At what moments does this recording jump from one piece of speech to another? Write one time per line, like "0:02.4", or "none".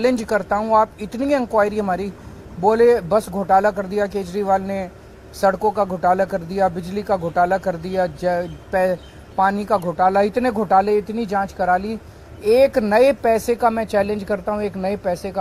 none

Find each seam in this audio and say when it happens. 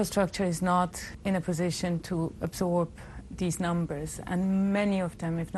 0:01.1

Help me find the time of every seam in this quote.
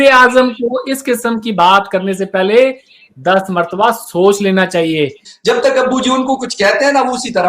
0:05.3

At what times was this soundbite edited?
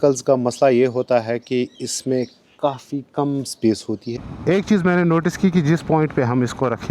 0:04.1

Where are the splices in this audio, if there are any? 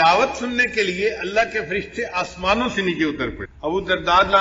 0:03.5

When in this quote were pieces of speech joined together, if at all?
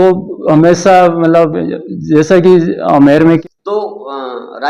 0:03.4

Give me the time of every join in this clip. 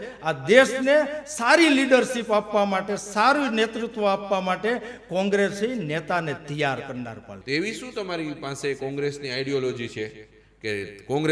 0:07.3

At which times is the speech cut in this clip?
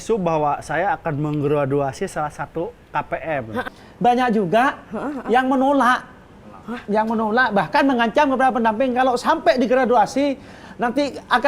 0:03.6

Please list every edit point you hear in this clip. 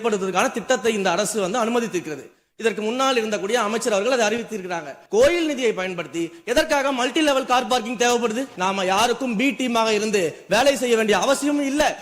0:04.9
0:08.5

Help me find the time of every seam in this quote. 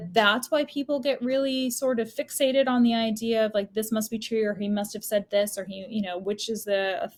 none

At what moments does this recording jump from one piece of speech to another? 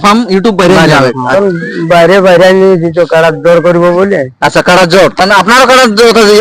0:01.3

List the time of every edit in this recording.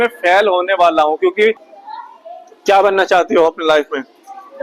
0:01.7

